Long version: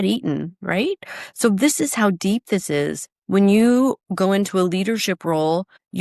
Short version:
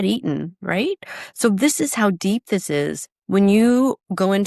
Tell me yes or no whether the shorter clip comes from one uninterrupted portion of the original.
yes